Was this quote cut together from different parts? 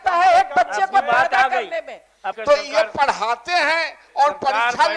yes; 1 cut; at 2.2 s

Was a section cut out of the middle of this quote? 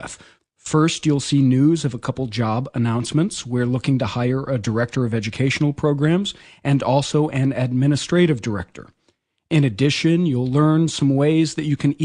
yes; 1 cut; at 7.4 s

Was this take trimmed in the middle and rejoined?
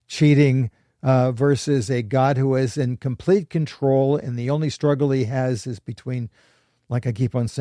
no; 0 cuts

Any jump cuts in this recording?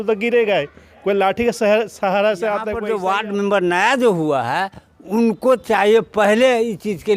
yes; 1 cut; at 2.7 s

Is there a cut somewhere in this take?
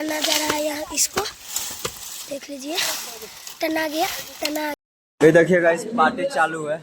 yes; 1 cut; at 4.8 s

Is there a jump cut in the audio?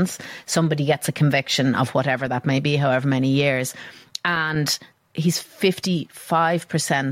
yes; 1 cut; at 5.0 s

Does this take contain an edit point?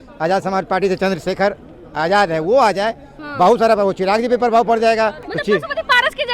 yes; 1 cut; at 5.3 s

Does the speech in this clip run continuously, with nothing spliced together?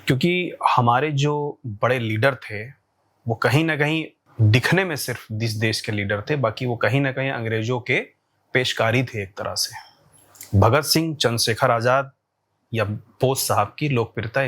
no; 1 cut; at 4.2 s

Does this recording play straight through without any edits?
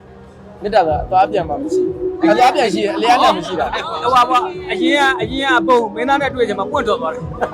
yes; 0 cuts

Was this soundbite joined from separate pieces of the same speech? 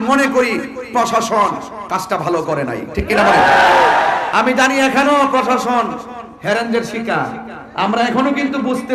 no; 0 cuts

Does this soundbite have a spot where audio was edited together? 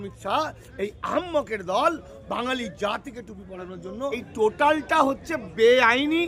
yes; 1 cut; at 4.3 s

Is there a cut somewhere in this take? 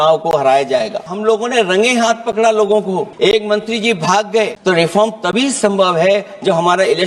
yes; 3 cuts; at 1.1 s, 3.1 s, 4.6 s

